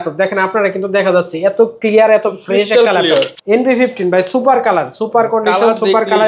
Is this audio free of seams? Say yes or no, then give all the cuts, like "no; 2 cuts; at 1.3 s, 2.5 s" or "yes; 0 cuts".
no; 1 cut; at 3.4 s